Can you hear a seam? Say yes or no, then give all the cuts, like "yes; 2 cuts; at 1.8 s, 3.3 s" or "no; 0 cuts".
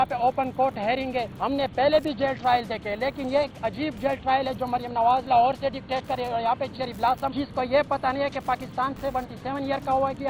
yes; 1 cut; at 1.3 s